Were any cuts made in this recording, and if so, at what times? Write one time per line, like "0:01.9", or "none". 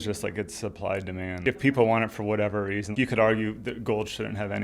0:01.4
0:02.9